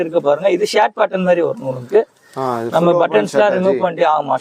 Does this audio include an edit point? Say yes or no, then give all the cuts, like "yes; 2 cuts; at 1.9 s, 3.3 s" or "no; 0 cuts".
no; 0 cuts